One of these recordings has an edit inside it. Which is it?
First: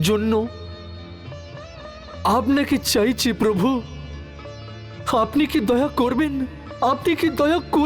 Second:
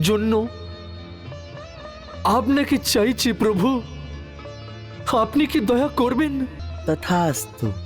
second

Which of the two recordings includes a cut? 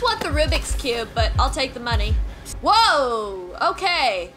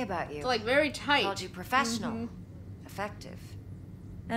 first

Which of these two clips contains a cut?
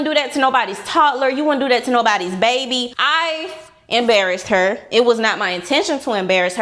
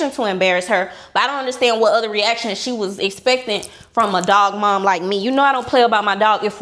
first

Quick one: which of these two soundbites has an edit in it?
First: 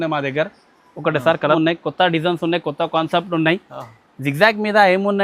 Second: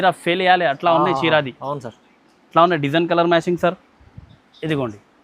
first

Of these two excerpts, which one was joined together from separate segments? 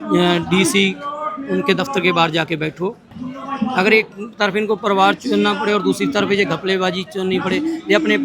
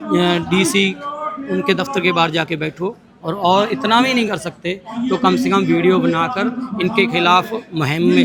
first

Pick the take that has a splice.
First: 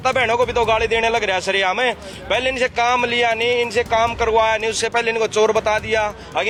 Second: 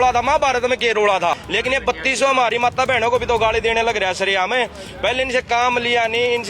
second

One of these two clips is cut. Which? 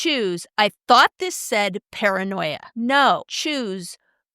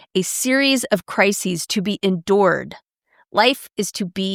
first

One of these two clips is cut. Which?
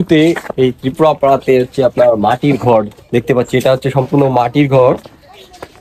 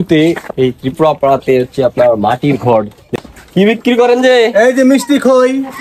second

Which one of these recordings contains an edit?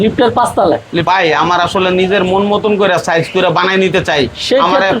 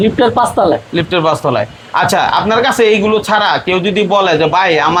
first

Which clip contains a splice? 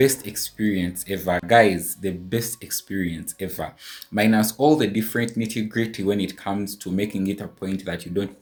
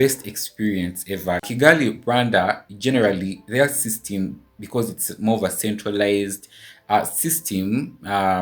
second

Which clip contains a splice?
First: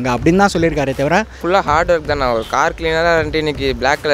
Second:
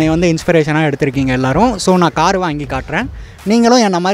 first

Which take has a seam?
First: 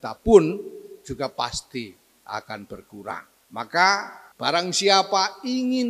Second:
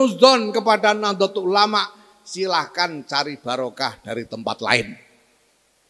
first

